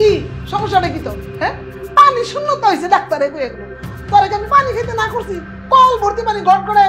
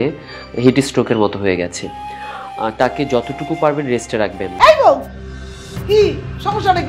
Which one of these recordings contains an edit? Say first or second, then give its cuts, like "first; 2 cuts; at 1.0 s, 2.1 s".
second; 1 cut; at 4.5 s